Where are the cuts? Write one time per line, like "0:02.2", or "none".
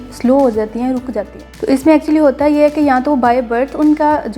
0:01.5